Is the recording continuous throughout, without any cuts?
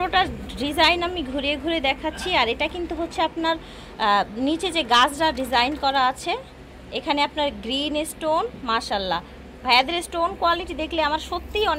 yes; 0 cuts

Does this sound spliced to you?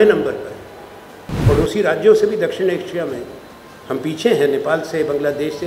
yes; 1 cut; at 1.5 s

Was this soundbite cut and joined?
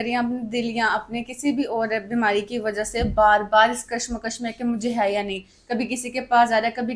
no; 0 cuts

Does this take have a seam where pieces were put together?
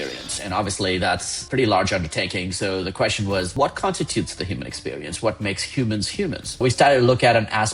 yes; 3 cuts; at 1.3 s, 3.6 s, 6.6 s

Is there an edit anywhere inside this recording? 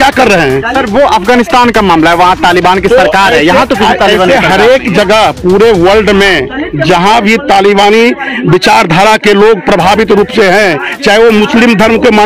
no; 0 cuts

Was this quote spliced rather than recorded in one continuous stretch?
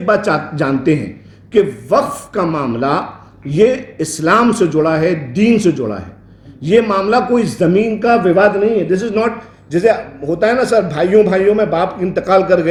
no; 0 cuts

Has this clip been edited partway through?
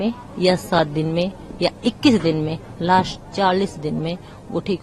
no; 0 cuts

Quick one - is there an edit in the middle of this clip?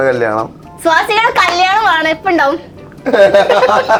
no; 0 cuts

